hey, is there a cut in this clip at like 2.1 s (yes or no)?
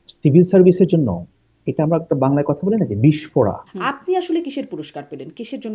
no